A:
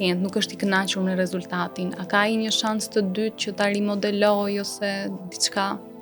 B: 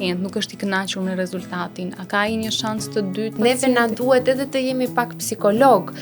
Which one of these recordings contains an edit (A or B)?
B